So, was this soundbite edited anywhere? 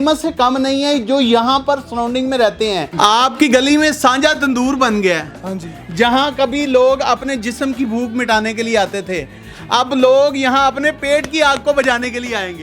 yes; 1 cut; at 2.9 s

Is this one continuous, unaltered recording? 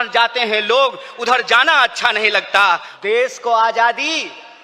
no; 1 cut; at 2.9 s

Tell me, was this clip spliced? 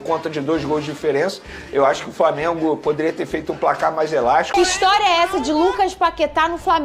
yes; 1 cut; at 4.5 s

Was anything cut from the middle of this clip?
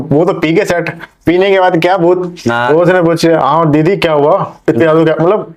no; 0 cuts

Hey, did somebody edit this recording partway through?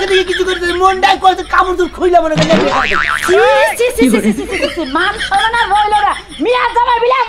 no; 0 cuts

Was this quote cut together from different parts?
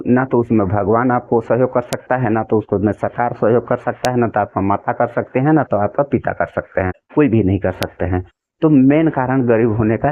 no; 0 cuts

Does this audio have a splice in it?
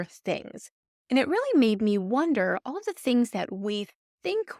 no; 0 cuts

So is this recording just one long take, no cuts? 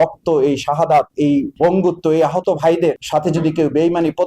no; 2 cuts; at 1.5 s, 3.0 s

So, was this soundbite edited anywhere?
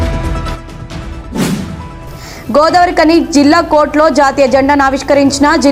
no; 0 cuts

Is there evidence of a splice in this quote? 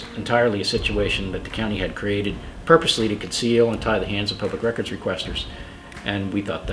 no; 0 cuts

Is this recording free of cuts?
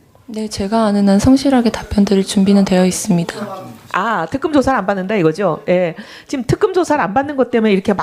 no; 1 cut; at 4.0 s

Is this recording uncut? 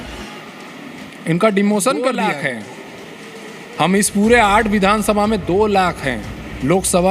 no; 1 cut; at 2.1 s

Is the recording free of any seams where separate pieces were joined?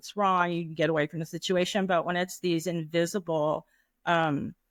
yes; 0 cuts

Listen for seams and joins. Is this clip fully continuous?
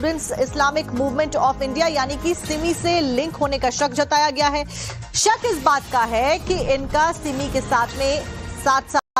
yes; 0 cuts

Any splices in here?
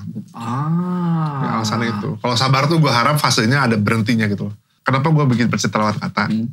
yes; 1 cut; at 4.7 s

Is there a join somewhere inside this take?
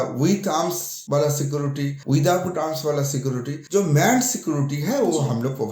yes; 3 cuts; at 0.9 s, 2.0 s, 3.5 s

